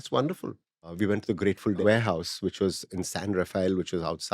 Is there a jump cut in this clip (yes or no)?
yes